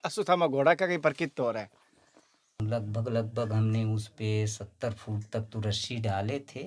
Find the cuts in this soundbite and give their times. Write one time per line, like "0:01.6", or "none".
0:02.6